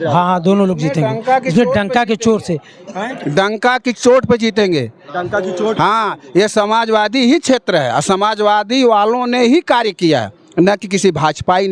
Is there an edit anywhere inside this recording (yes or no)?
no